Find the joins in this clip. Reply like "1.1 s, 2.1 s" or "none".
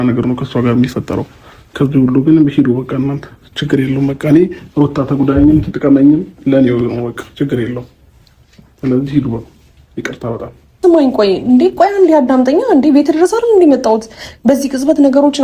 10.8 s